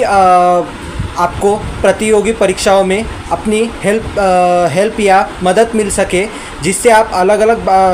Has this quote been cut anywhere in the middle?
no; 0 cuts

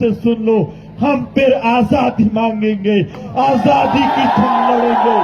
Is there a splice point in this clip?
no; 0 cuts

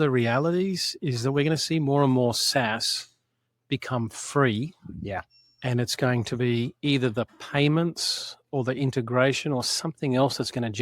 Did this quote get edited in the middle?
no; 0 cuts

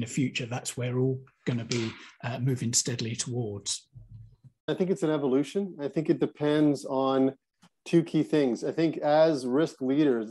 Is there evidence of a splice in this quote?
yes; 1 cut; at 4.7 s

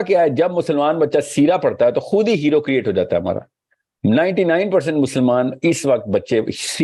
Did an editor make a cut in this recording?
no; 0 cuts

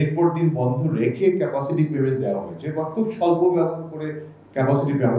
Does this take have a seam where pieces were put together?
no; 0 cuts

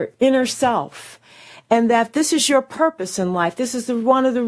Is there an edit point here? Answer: no; 0 cuts

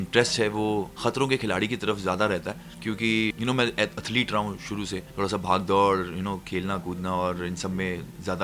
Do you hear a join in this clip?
no; 0 cuts

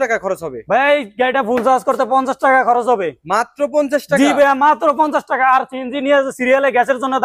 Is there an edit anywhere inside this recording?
no; 0 cuts

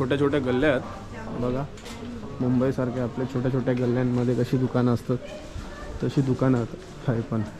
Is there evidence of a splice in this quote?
no; 0 cuts

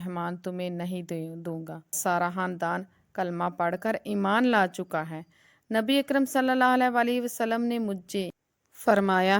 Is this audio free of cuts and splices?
no; 1 cut; at 2.0 s

